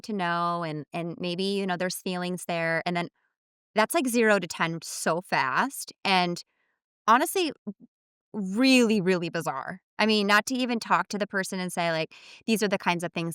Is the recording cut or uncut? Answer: uncut